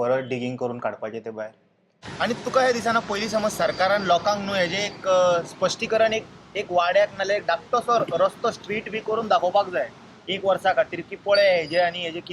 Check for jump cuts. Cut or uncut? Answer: cut